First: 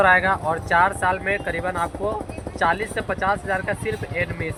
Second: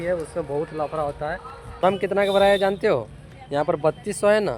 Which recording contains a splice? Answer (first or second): second